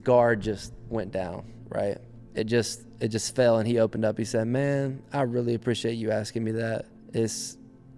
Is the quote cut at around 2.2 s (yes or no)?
yes